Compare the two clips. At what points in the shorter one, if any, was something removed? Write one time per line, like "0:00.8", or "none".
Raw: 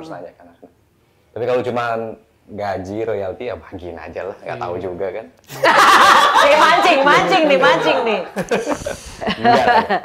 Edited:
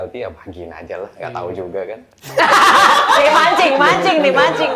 none